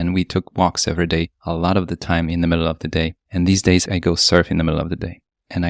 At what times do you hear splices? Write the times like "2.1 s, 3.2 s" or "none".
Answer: 1.4 s, 3.2 s, 3.8 s

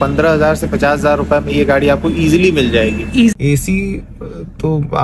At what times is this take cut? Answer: 3.3 s

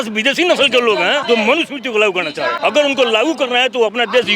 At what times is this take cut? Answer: 1.2 s, 2.6 s

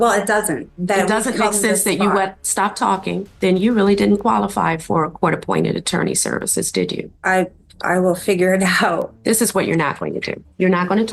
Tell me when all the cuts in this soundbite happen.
3.3 s, 7.1 s, 9.1 s

